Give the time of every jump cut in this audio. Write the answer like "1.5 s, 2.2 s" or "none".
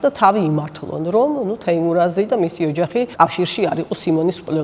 3.1 s